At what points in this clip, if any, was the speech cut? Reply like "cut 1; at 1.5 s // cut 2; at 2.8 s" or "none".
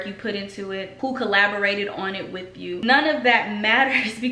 cut 1; at 0.9 s // cut 2; at 2.8 s